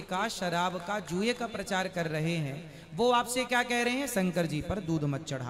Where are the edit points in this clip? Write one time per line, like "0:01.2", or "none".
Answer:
none